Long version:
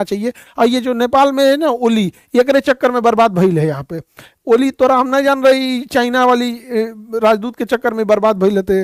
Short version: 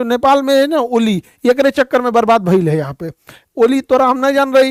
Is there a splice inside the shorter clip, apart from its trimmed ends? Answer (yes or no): no